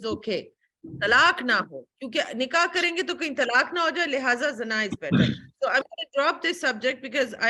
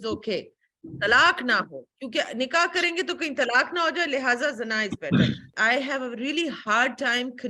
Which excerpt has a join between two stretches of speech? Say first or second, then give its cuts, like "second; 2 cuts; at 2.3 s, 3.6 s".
second; 1 cut; at 5.5 s